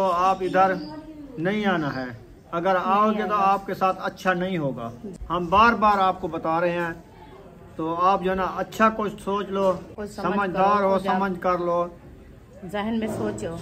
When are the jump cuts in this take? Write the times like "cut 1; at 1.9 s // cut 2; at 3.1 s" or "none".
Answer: cut 1; at 5.1 s // cut 2; at 10.0 s